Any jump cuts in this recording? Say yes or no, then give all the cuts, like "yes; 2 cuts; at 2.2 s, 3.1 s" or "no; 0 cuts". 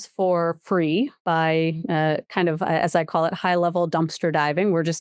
no; 0 cuts